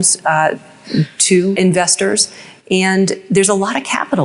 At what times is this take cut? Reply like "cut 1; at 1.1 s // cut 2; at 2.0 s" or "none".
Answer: cut 1; at 1.6 s